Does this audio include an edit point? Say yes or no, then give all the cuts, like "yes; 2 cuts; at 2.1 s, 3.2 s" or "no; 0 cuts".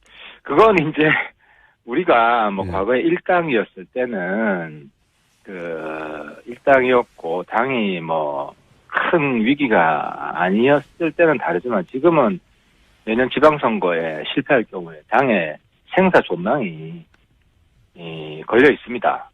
yes; 1 cut; at 14.5 s